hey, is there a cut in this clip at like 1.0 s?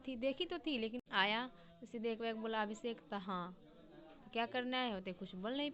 yes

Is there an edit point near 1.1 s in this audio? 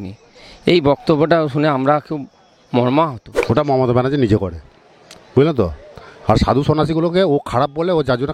no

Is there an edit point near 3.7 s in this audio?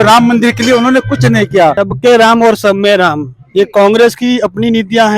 no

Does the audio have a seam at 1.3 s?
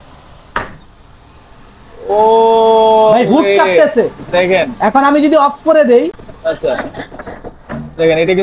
no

